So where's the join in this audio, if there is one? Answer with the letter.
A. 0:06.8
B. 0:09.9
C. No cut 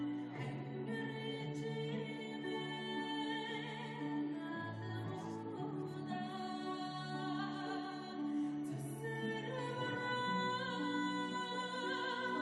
B